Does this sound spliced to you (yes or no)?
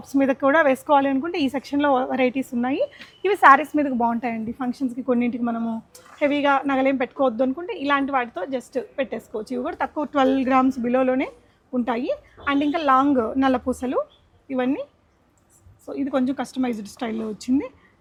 no